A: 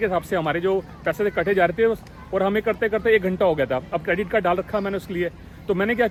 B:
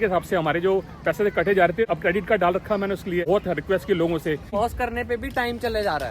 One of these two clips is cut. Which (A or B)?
B